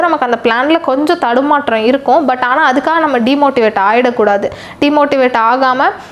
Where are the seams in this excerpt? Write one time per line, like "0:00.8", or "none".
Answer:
none